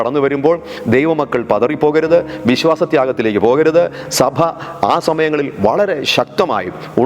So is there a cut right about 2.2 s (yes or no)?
no